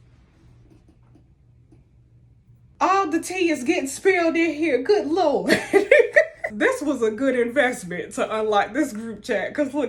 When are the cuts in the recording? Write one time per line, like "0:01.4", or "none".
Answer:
0:02.7
0:06.5